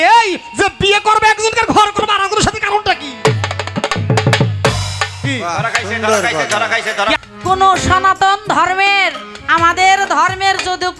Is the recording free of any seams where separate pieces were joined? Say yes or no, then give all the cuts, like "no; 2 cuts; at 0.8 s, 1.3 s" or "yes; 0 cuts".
no; 1 cut; at 7.2 s